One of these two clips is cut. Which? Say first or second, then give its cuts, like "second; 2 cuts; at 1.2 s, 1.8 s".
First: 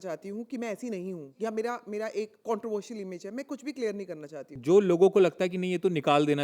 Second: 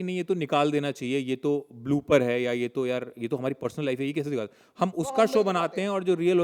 first; 3 cuts; at 1.3 s, 2.4 s, 4.5 s